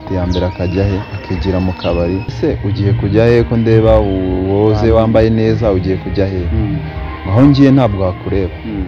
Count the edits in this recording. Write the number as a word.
one